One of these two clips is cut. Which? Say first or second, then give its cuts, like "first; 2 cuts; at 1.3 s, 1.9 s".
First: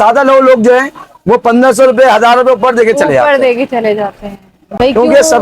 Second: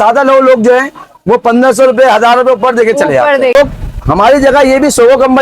second; 1 cut; at 3.5 s